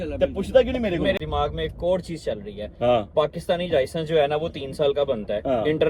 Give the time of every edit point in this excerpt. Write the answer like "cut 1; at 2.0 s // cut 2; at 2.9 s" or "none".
none